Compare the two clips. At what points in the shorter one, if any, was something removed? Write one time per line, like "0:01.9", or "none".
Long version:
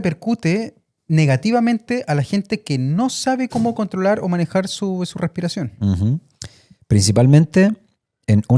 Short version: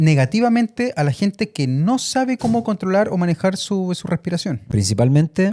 0:04.6